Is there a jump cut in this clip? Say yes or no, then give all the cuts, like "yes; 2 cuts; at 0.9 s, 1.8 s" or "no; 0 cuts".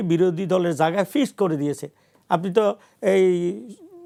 no; 0 cuts